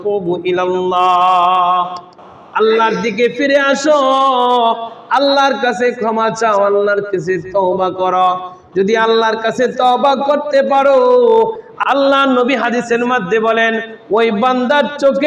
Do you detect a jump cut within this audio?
yes; 1 cut; at 11.7 s

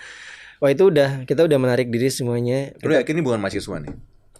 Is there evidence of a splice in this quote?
yes; 1 cut; at 2.7 s

